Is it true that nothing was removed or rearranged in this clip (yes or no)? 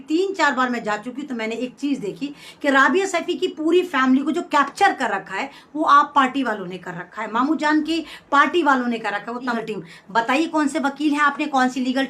no